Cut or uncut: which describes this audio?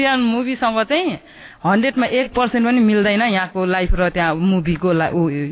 uncut